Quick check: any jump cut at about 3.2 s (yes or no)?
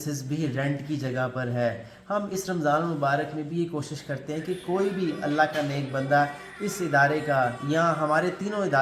no